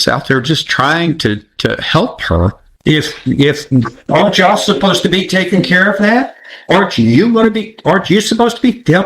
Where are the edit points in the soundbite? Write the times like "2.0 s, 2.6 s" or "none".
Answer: 2.7 s

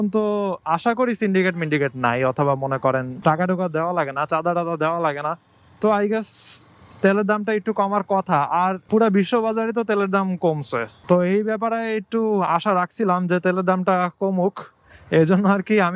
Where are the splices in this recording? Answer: none

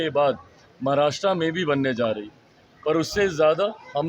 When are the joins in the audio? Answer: none

